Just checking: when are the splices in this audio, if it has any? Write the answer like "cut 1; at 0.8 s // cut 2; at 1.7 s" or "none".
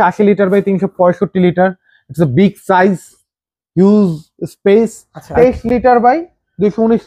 cut 1; at 5.2 s